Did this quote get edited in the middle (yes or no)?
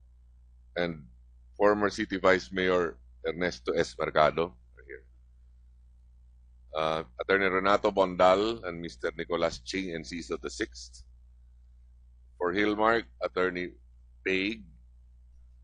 yes